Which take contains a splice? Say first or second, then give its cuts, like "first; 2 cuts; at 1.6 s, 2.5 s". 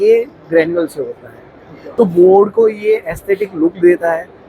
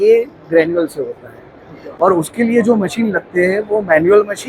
first; 1 cut; at 1.9 s